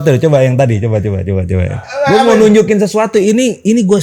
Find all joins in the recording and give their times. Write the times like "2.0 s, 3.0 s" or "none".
none